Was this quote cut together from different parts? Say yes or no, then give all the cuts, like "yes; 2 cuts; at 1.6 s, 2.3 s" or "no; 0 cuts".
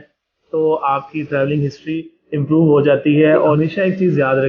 yes; 1 cut; at 3.6 s